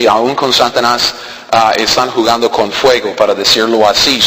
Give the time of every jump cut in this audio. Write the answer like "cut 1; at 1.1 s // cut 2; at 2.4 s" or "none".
cut 1; at 2.4 s